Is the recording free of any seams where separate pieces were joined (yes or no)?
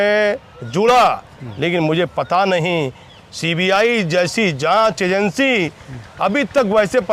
yes